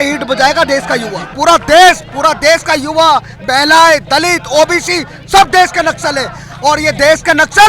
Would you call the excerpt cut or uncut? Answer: cut